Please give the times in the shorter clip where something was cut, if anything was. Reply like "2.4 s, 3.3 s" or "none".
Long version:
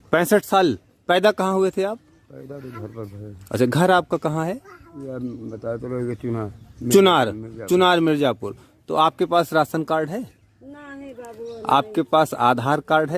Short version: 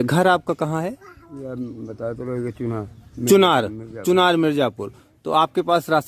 none

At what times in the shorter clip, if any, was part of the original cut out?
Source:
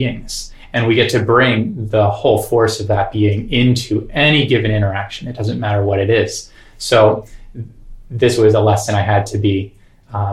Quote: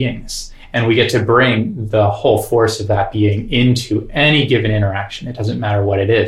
none

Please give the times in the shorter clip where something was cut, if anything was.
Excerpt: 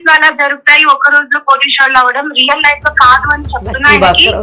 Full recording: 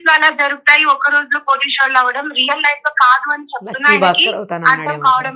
none

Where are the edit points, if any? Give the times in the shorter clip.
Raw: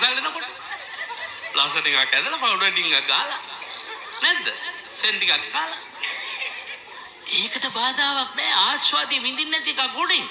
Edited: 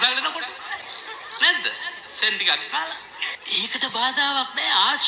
0.9 s, 3.4 s

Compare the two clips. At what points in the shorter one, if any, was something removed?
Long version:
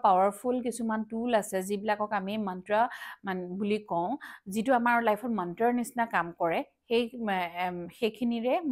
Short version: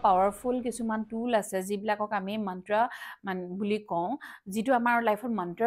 none

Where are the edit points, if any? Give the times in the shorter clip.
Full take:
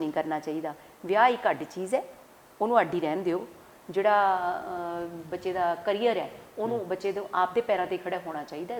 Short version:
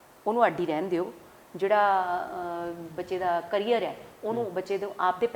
none

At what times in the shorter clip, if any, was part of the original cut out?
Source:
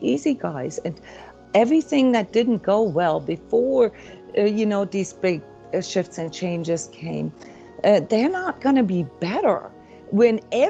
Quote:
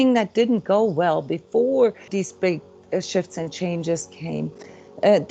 2.1 s

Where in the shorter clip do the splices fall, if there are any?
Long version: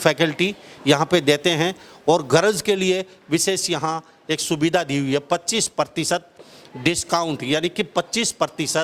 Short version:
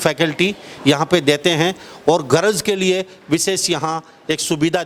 none

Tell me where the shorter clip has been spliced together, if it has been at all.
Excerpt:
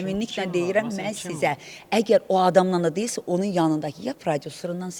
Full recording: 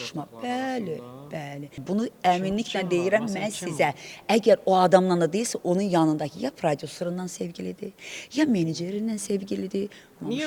none

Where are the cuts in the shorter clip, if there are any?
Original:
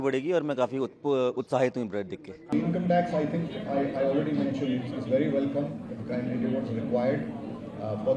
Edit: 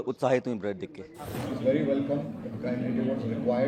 1.2 s

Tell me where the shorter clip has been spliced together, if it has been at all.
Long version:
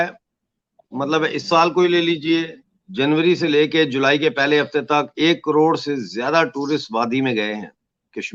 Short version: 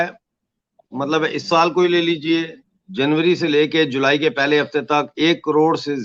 none

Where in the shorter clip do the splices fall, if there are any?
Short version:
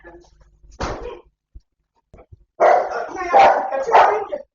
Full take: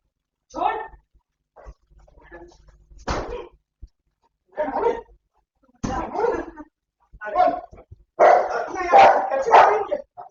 2.1 s

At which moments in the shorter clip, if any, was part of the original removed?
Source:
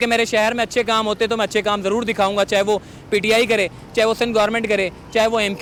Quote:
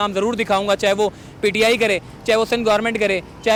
none

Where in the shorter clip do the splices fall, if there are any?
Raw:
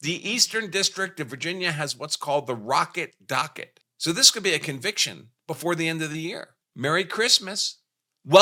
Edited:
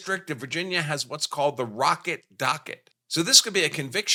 none

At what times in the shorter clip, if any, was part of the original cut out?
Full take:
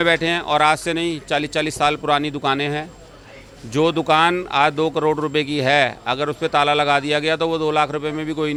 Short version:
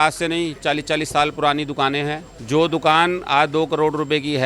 2.3 s

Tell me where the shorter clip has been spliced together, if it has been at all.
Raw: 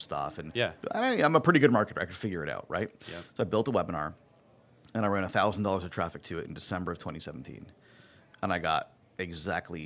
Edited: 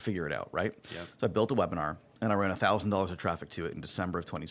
2.0 s

